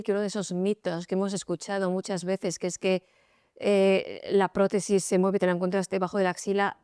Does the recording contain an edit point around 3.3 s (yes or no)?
no